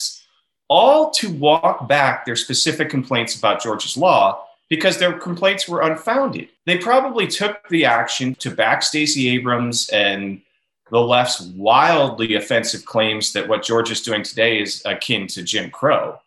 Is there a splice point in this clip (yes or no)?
yes